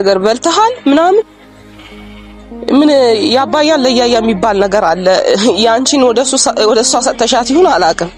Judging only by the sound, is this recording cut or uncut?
uncut